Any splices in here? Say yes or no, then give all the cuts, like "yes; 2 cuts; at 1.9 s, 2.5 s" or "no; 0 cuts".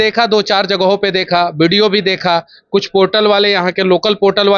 no; 0 cuts